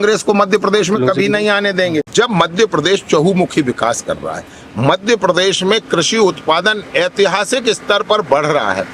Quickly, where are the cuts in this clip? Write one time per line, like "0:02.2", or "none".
0:02.1